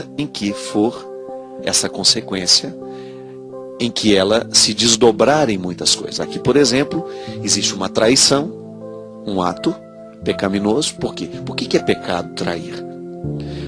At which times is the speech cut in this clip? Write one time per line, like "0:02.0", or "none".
0:03.2